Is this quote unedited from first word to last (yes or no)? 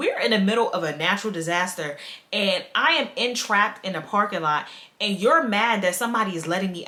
yes